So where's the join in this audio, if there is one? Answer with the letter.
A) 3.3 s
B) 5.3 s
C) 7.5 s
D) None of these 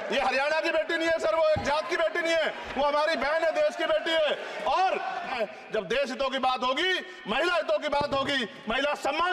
B